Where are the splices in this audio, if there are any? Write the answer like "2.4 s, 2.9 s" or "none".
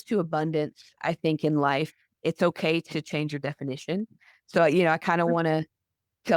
none